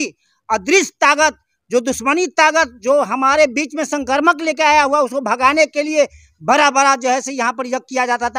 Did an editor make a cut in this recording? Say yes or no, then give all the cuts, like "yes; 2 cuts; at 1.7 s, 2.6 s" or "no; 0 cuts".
no; 0 cuts